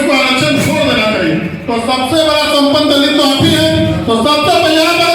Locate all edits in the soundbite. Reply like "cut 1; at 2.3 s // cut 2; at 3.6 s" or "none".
none